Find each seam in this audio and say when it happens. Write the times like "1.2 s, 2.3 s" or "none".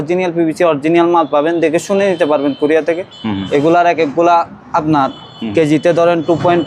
none